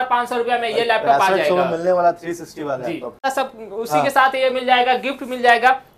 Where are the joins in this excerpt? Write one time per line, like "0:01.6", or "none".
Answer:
0:03.2

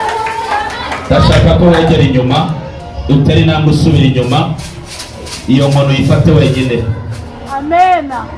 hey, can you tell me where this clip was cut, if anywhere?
none

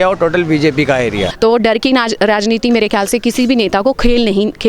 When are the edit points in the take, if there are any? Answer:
0:01.3

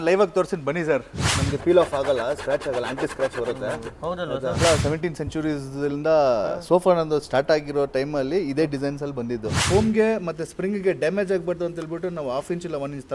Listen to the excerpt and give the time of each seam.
0:01.2
0:04.6
0:09.6

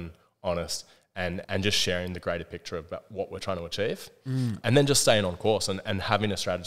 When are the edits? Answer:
0:01.4
0:04.6

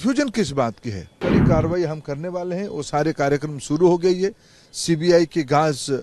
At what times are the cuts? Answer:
0:01.2

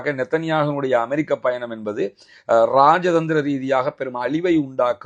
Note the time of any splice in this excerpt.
none

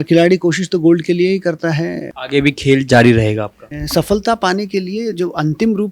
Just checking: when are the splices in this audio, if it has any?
0:02.0
0:03.6

